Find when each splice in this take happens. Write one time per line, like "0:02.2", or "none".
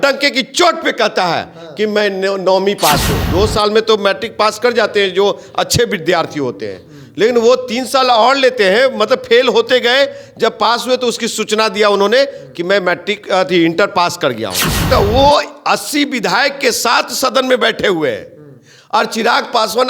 0:03.2
0:14.9